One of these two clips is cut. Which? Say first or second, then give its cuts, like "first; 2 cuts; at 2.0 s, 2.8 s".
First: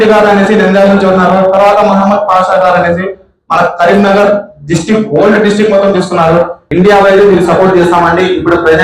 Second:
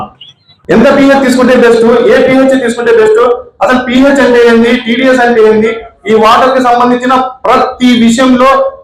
first; 1 cut; at 6.6 s